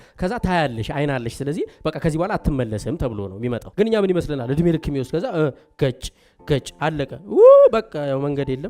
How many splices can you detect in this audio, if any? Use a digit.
1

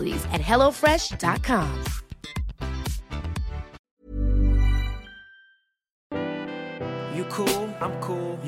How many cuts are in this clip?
2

